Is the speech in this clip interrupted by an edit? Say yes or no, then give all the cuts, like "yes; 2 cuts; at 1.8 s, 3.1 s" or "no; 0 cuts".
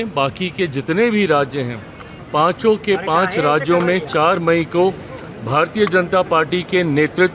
no; 0 cuts